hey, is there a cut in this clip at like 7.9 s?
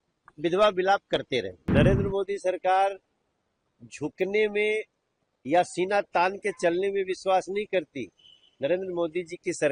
no; 1 cut; at 1.6 s

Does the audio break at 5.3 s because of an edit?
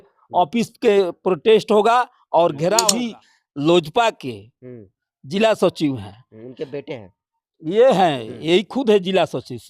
no; 1 cut; at 2.9 s

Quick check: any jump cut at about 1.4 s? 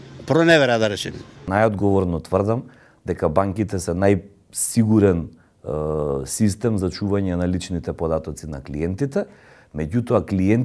yes; 1 cut; at 1.4 s

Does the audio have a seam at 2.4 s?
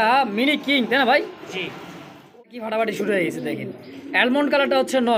yes; 1 cut; at 2.4 s

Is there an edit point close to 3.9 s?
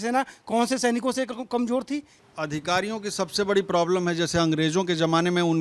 no; 1 cut; at 2.2 s

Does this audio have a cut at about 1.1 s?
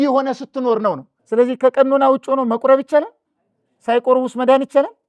yes; 1 cut; at 1.1 s

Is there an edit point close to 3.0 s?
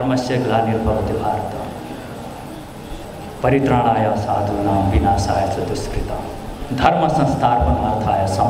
yes; 1 cut; at 3.0 s

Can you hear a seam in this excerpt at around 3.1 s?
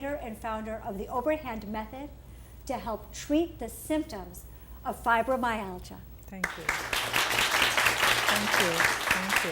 yes; 1 cut; at 3.1 s

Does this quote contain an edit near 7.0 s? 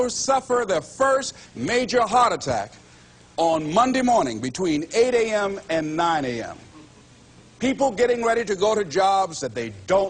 no; 0 cuts

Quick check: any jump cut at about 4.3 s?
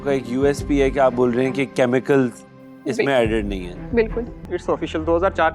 yes; 1 cut; at 4.3 s

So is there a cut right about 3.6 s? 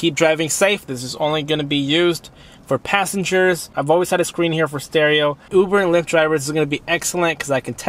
no; 0 cuts

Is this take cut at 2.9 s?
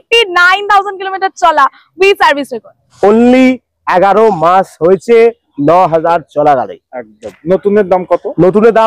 yes; 1 cut; at 2.9 s

